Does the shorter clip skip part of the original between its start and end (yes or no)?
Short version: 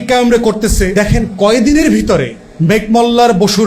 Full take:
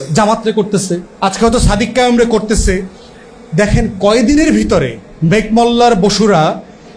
yes